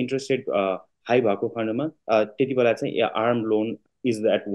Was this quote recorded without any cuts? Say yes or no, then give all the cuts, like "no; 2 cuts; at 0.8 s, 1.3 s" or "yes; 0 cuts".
yes; 0 cuts